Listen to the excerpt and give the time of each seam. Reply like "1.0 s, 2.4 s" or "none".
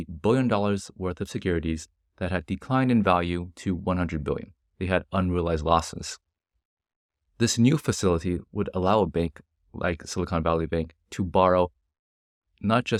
none